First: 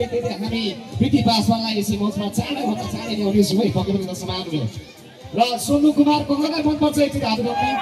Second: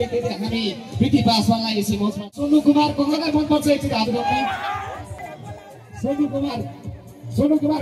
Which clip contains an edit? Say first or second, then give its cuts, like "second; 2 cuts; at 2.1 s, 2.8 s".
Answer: second; 2 cuts; at 2.3 s, 5.3 s